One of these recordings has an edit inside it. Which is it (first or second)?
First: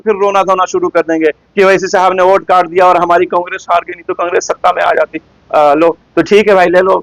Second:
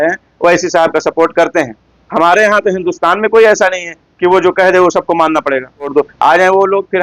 second